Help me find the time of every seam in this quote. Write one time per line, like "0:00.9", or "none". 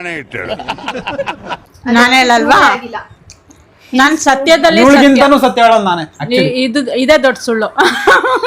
0:01.7